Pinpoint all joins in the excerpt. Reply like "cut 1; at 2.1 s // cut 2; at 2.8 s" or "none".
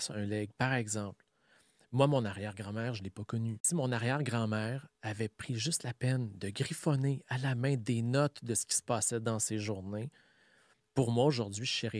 cut 1; at 3.6 s